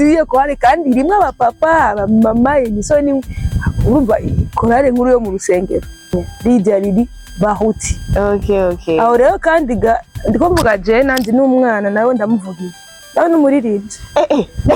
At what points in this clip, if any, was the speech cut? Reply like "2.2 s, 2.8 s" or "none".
6.1 s